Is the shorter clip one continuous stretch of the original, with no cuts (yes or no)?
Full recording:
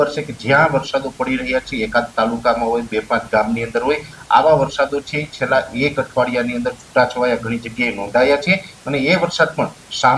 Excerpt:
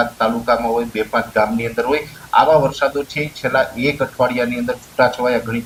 yes